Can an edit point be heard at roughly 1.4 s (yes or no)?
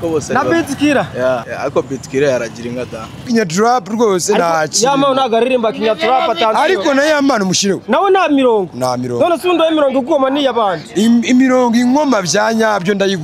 yes